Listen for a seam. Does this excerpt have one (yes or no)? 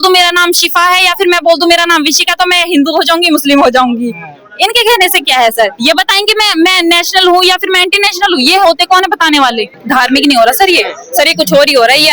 yes